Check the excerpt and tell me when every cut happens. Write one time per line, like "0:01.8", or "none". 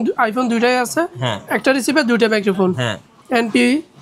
0:03.1